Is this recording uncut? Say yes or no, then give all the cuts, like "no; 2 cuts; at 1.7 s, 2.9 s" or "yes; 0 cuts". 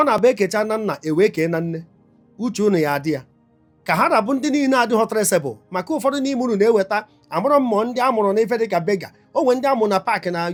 yes; 0 cuts